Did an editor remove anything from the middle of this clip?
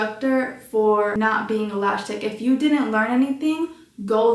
yes; 1 cut; at 1.1 s

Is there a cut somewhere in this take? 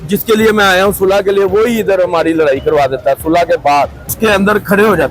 yes; 1 cut; at 4.1 s

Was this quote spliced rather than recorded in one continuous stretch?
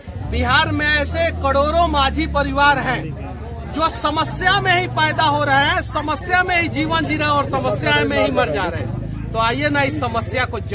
no; 0 cuts

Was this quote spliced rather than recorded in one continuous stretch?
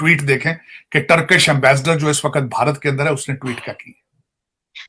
no; 0 cuts

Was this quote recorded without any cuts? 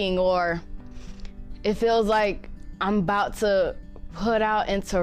yes; 0 cuts

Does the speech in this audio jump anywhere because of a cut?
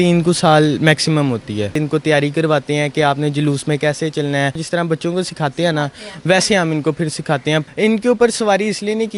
yes; 3 cuts; at 1.8 s, 4.6 s, 7.7 s

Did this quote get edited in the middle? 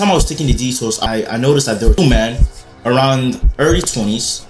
yes; 2 cuts; at 1.0 s, 2.0 s

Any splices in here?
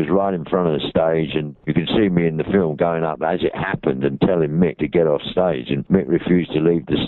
yes; 2 cuts; at 1.5 s, 4.8 s

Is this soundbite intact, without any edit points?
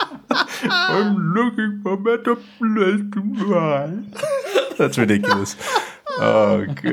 yes; 0 cuts

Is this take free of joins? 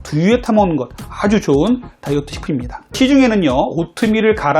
no; 1 cut; at 3.0 s

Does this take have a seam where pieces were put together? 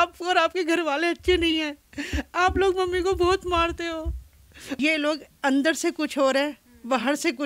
yes; 1 cut; at 4.8 s

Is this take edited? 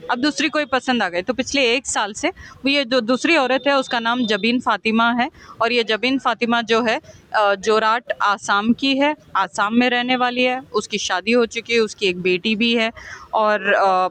no; 0 cuts

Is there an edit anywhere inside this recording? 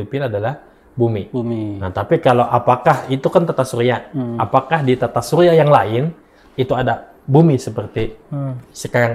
no; 0 cuts

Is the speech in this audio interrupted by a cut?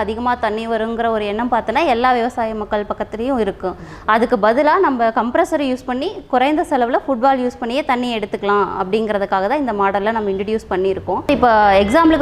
yes; 1 cut; at 11.3 s

